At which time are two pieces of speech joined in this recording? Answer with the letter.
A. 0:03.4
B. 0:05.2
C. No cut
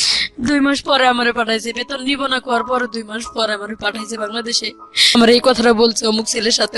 B